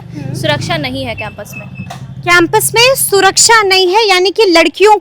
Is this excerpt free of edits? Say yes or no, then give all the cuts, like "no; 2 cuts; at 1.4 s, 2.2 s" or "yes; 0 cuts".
yes; 0 cuts